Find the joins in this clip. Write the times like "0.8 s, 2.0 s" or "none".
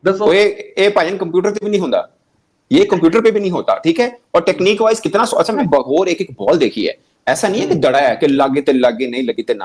none